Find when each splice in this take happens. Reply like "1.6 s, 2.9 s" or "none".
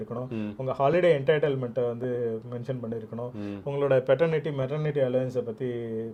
none